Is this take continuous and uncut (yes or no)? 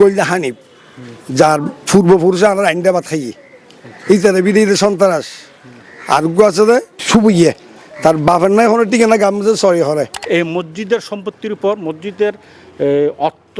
no